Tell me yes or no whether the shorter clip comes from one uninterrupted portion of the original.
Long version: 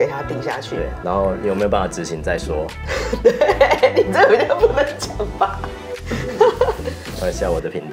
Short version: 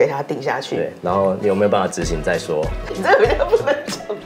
no